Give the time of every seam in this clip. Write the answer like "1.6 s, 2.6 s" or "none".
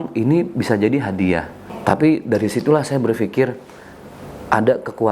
1.7 s